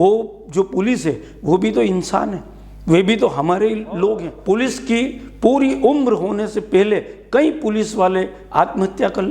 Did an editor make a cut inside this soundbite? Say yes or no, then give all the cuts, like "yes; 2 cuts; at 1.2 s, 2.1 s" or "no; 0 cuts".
yes; 1 cut; at 4.3 s